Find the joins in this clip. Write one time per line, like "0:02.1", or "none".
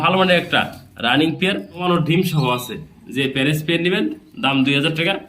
0:01.8